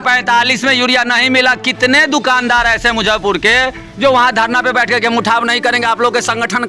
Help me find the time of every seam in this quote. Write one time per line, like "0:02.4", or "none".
none